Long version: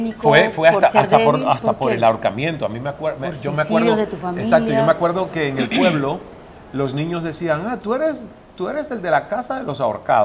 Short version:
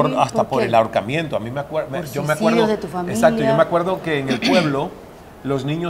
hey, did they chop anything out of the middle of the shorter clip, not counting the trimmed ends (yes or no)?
no